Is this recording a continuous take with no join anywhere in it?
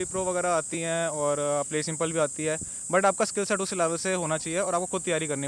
yes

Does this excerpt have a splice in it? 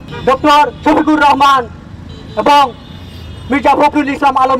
no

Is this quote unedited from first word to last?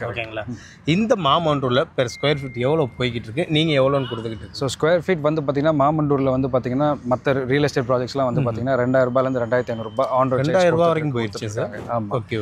yes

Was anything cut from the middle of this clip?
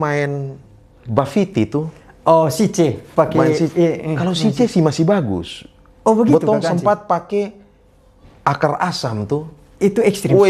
no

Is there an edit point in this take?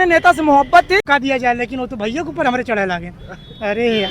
yes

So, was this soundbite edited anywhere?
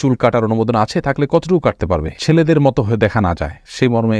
no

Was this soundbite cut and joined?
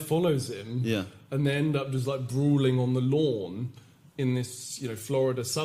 no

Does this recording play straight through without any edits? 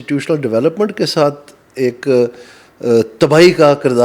yes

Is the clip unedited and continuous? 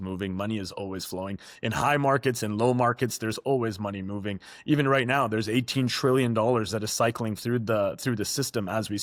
yes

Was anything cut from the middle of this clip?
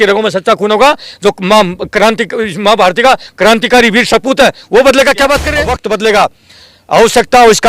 yes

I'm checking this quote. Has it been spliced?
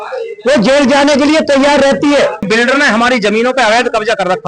yes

